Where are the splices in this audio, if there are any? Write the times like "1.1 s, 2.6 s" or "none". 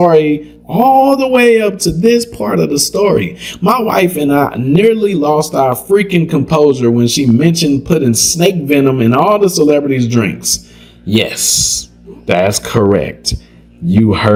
none